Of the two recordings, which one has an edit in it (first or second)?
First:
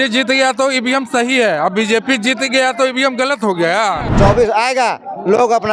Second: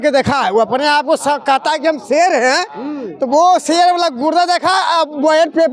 first